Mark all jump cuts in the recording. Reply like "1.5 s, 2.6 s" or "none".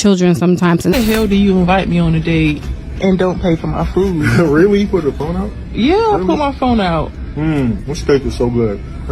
0.9 s